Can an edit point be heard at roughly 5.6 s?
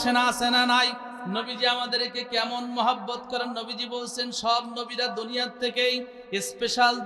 no; 1 cut; at 1.1 s

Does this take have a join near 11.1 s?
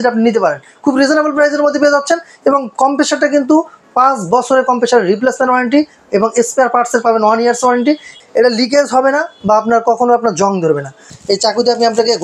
yes; 2 cuts; at 8.2 s, 11.1 s

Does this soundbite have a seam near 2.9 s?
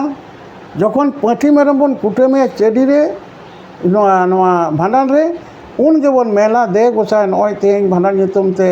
no; 0 cuts

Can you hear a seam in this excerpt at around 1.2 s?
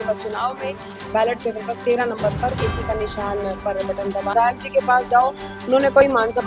no; 1 cut; at 4.3 s

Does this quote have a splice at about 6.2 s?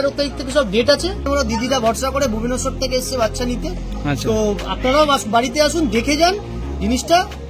no; 1 cut; at 1.2 s

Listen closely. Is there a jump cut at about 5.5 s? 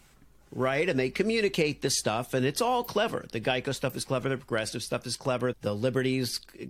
yes; 1 cut; at 5.5 s

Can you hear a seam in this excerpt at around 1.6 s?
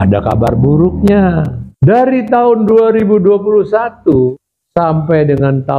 yes; 2 cuts; at 1.6 s, 4.5 s

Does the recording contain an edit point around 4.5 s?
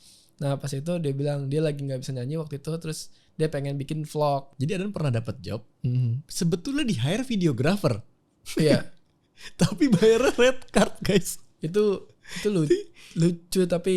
yes; 1 cut; at 4.5 s

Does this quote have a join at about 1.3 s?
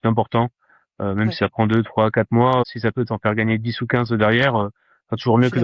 no; 1 cut; at 2.6 s

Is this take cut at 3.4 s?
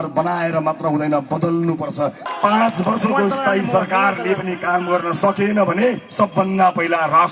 no; 1 cut; at 2.2 s

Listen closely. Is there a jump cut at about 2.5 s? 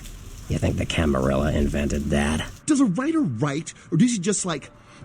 yes; 1 cut; at 2.5 s

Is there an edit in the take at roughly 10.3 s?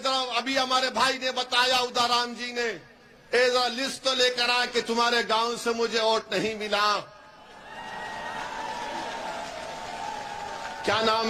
no; 0 cuts

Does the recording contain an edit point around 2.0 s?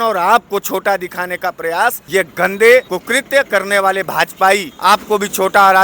yes; 3 cuts; at 2.0 s, 3.0 s, 4.7 s

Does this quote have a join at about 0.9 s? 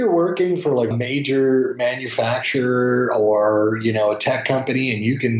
yes; 1 cut; at 0.9 s

